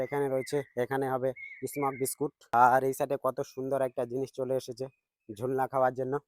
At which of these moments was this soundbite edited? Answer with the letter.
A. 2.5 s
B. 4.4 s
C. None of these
A